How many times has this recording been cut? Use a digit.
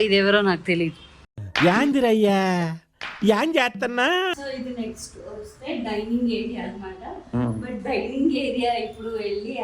1